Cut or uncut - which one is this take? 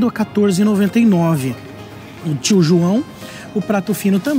uncut